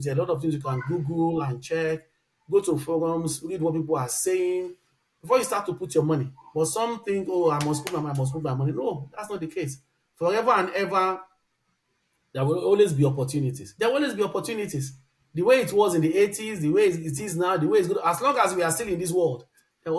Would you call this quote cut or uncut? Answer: uncut